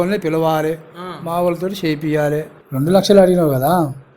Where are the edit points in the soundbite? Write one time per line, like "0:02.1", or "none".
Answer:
0:02.6

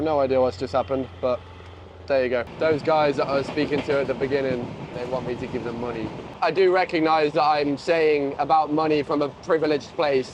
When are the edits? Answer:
0:02.5
0:05.0
0:06.3

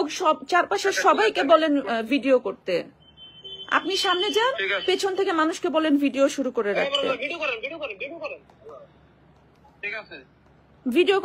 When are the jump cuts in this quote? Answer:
none

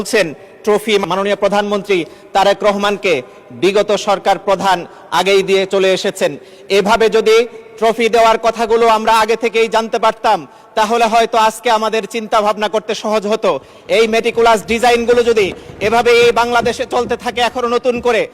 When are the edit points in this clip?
0:01.0

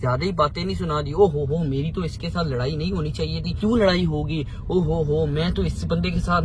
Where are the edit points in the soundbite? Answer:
none

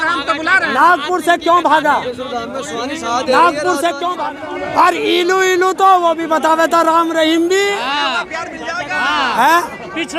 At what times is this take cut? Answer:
0:04.2

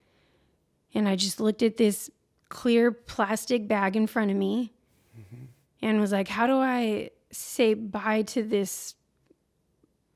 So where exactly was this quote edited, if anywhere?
none

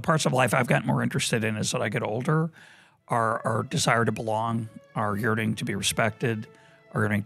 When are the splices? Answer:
none

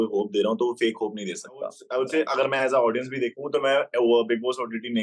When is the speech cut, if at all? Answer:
0:01.8

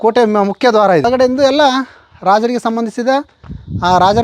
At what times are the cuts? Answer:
0:01.1

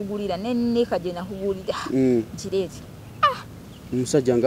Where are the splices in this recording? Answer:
none

